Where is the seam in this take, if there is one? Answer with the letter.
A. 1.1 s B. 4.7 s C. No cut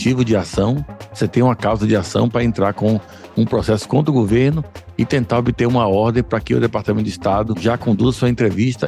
C